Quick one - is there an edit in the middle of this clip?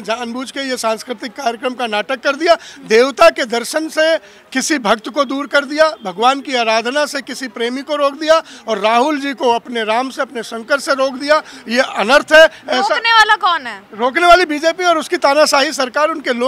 no; 0 cuts

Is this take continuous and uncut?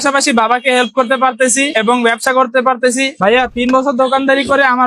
no; 1 cut; at 3.1 s

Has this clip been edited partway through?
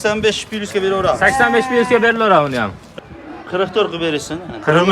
yes; 1 cut; at 2.8 s

